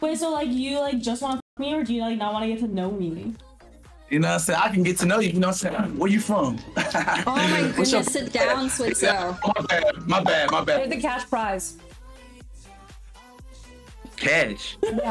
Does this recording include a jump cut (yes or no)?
yes